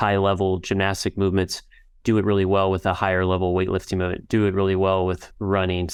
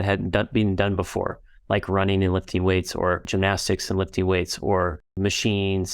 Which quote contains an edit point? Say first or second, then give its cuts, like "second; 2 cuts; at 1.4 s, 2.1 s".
second; 2 cuts; at 3.3 s, 5.2 s